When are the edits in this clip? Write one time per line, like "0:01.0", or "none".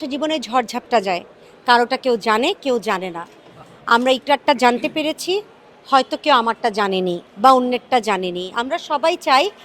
none

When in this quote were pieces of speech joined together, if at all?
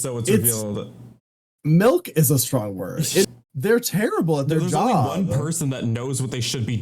0:03.2

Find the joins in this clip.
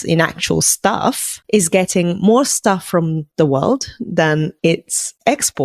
0:01.3
0:03.2
0:04.7

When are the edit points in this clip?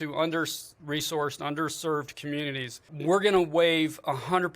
0:02.9

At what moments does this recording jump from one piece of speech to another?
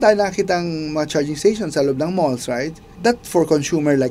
0:02.8

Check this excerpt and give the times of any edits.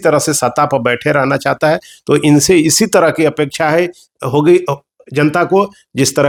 none

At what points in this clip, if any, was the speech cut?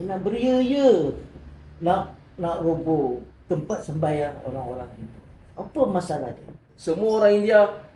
0:03.3
0:06.7

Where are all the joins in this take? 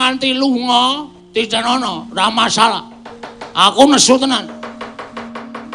0:01.5

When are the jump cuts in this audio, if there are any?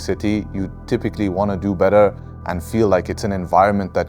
none

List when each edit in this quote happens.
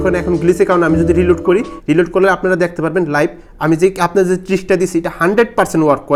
none

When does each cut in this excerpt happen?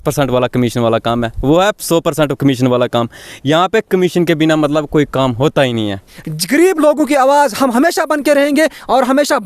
0:06.1

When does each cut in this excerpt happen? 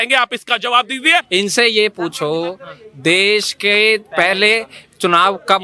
0:01.3

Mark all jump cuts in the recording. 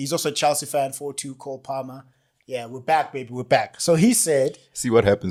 none

